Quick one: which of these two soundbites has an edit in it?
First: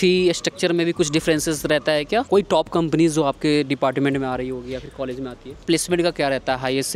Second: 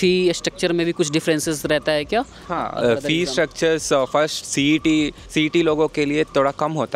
first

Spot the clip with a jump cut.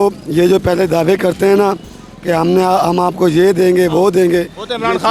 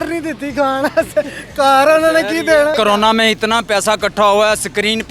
second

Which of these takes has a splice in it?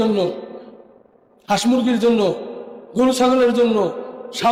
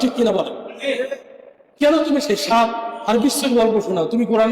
second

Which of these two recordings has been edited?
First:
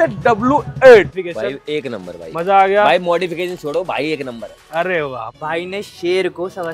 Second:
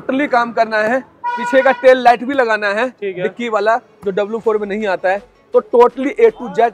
first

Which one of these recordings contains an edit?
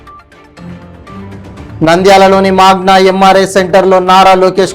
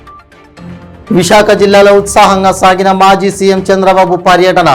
second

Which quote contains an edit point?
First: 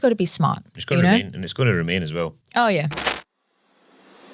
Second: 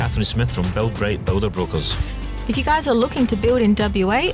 first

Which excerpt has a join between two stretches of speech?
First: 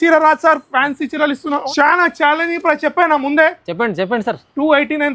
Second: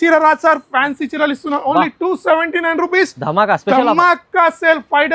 first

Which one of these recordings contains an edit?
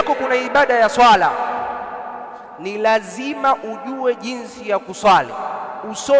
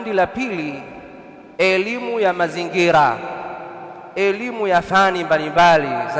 second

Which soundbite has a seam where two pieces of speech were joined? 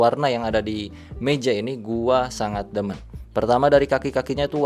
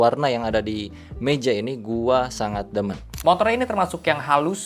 second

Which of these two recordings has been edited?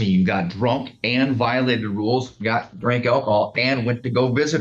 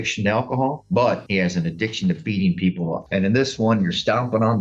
second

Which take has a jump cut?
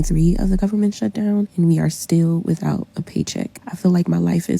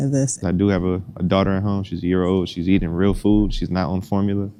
first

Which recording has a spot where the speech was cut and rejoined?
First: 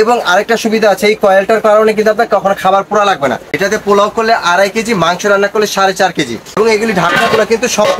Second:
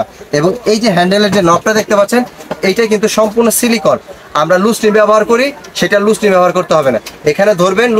first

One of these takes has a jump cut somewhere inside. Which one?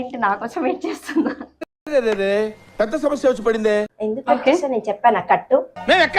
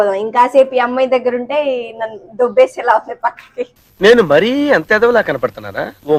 first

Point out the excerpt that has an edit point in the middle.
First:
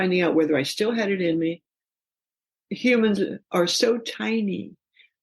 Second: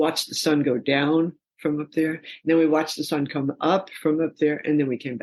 first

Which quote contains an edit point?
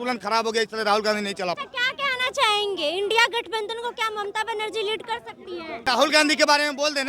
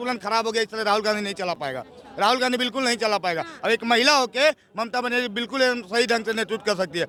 first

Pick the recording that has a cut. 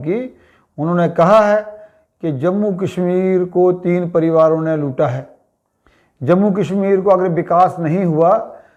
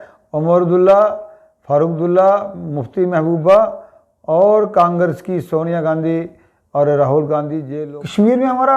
second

